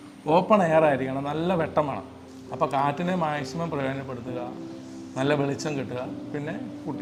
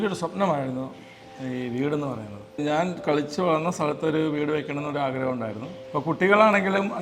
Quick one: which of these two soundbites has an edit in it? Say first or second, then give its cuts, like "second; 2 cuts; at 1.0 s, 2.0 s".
second; 2 cuts; at 2.4 s, 5.7 s